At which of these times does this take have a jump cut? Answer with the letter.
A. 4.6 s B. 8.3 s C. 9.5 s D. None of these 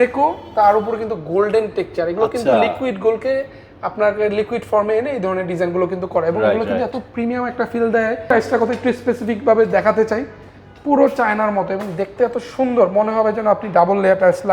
B